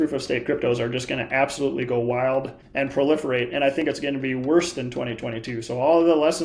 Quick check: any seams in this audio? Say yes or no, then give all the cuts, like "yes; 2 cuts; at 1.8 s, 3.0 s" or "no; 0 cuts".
yes; 1 cut; at 2.6 s